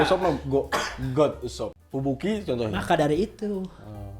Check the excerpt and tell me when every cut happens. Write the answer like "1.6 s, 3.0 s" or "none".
1.8 s